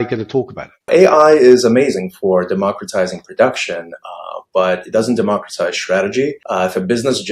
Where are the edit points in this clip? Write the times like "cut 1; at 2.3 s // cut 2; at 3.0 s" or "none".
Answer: cut 1; at 0.9 s // cut 2; at 6.4 s